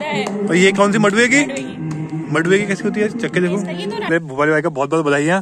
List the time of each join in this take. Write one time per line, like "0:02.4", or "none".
0:04.1

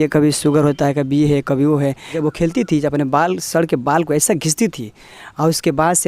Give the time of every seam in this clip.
0:02.1

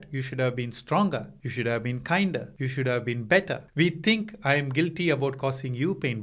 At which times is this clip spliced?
0:01.4
0:02.6
0:03.6

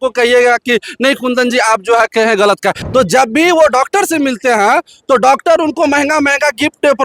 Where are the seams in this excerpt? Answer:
0:02.8

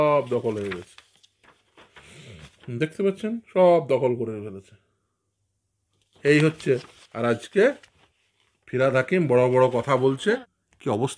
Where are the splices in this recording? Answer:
0:10.2

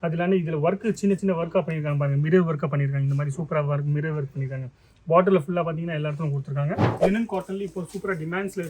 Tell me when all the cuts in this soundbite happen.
0:06.9

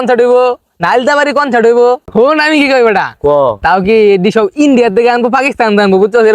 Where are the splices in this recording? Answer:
0:02.0

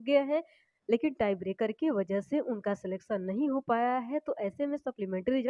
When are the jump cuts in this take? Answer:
none

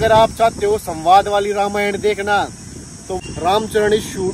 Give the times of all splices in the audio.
0:03.2

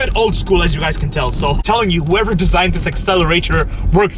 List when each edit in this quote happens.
0:01.6

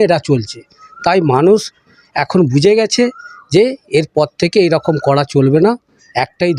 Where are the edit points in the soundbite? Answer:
none

